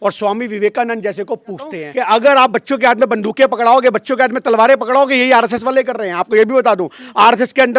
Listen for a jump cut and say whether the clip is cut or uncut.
cut